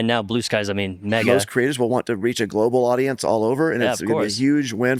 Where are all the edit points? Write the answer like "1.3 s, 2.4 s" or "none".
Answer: 1.2 s